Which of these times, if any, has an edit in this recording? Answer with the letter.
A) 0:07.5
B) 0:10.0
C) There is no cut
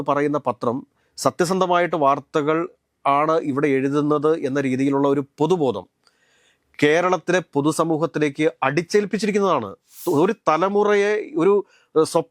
B